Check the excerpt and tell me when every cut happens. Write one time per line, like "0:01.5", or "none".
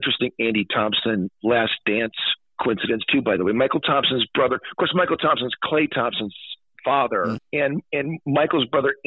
0:07.4